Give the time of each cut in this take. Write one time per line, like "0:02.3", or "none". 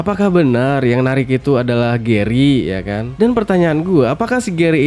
none